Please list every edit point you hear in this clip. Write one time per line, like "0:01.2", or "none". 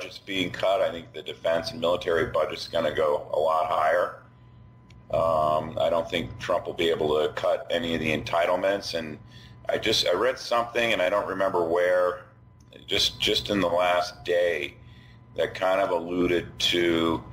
0:03.2